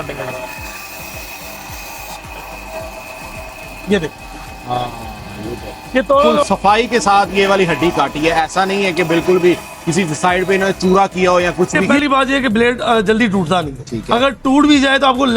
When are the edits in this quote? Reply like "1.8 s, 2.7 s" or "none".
6.4 s, 11.9 s